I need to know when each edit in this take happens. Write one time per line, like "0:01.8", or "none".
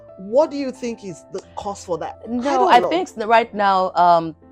0:02.1

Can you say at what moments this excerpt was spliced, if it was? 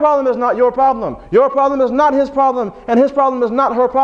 0:01.2

